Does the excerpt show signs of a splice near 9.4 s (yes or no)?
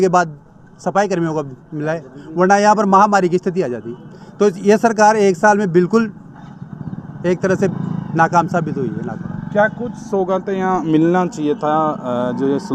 no